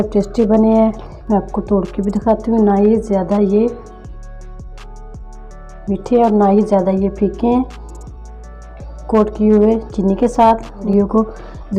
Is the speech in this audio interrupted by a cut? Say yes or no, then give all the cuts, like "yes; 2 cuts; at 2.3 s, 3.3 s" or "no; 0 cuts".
yes; 2 cuts; at 1.1 s, 10.8 s